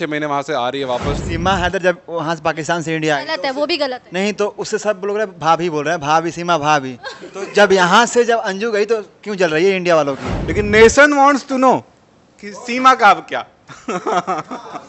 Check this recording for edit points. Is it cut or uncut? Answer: cut